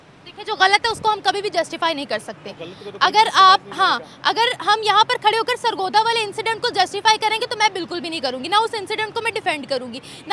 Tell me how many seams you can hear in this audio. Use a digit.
0